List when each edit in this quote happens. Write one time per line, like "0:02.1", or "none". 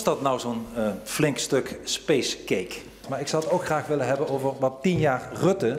0:03.0